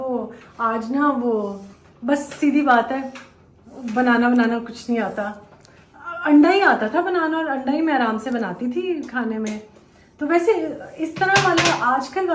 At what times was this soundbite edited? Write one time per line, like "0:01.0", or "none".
none